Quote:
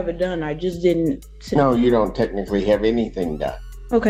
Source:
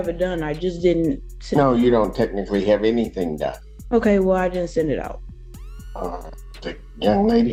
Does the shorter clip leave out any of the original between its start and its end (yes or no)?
no